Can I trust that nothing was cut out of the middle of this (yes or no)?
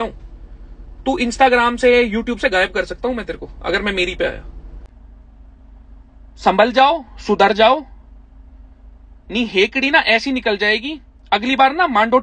no